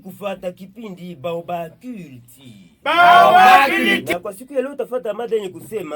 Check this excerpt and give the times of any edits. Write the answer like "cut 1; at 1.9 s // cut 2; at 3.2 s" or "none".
cut 1; at 4.1 s

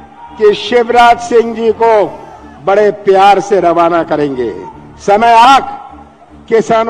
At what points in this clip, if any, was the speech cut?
cut 1; at 5.5 s

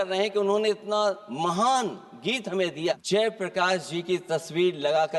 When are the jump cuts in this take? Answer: cut 1; at 3.0 s

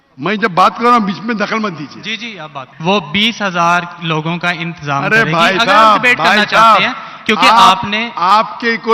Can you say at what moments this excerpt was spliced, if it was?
cut 1; at 2.6 s

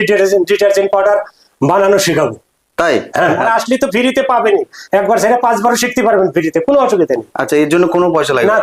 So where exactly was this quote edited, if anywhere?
cut 1; at 3.4 s

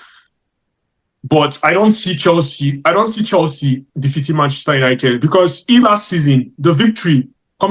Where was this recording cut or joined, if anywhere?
cut 1; at 5.8 s

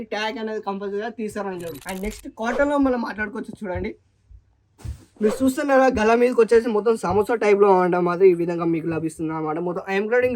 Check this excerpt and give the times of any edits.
cut 1; at 1.8 s

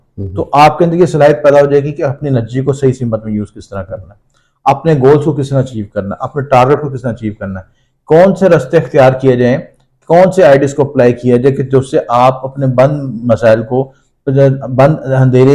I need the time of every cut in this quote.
none

